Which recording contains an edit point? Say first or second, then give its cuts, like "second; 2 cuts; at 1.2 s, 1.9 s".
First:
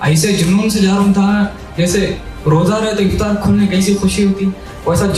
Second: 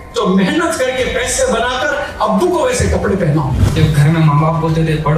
second; 1 cut; at 3.8 s